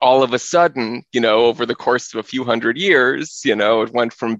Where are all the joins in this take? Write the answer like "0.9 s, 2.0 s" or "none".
none